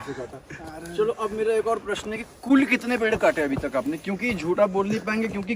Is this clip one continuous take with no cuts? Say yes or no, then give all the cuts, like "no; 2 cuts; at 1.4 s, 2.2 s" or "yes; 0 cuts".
yes; 0 cuts